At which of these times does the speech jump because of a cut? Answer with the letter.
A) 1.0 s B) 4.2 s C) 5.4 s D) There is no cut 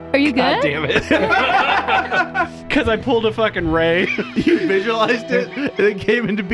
B